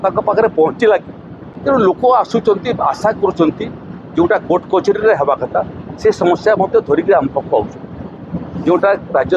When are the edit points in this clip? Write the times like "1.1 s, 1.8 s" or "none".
0.9 s